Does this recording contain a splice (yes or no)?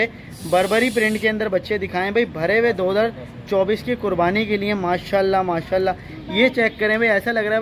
no